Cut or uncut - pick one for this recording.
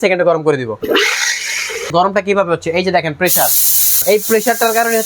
cut